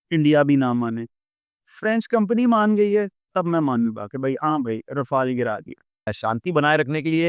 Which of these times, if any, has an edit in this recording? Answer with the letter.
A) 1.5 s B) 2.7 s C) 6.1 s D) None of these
C